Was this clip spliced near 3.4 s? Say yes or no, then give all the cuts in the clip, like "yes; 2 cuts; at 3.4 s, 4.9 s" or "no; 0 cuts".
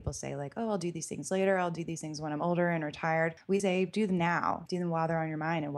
yes; 2 cuts; at 3.4 s, 4.6 s